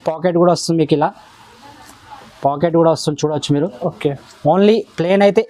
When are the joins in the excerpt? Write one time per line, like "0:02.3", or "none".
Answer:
none